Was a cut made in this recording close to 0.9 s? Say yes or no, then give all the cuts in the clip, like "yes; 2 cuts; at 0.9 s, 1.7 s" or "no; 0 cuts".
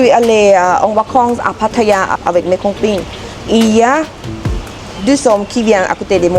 no; 1 cut; at 2.1 s